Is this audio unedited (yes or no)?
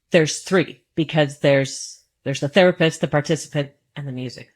yes